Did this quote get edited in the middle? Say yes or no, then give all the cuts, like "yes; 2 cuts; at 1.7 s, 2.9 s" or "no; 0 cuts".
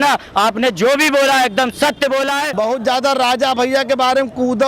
yes; 1 cut; at 2.5 s